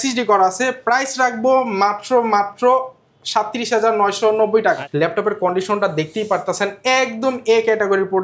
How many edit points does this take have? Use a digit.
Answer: 1